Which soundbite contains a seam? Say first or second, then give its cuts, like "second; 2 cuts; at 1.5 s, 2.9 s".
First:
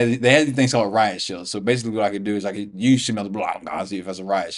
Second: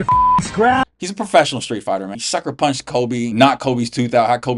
second; 3 cuts; at 0.9 s, 2.1 s, 3.3 s